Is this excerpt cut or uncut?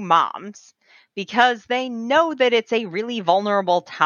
uncut